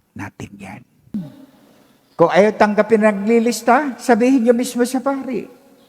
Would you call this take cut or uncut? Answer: cut